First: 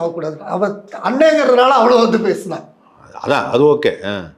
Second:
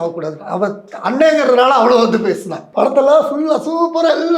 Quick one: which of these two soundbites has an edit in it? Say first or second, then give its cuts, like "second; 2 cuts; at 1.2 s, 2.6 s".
second; 1 cut; at 2.6 s